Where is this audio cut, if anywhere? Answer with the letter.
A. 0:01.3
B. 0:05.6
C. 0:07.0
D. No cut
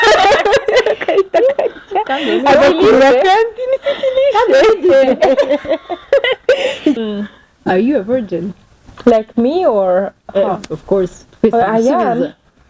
C